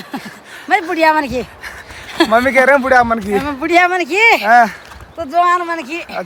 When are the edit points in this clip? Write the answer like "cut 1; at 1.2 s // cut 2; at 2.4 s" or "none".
none